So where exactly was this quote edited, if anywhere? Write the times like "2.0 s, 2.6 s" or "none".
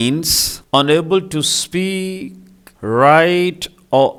none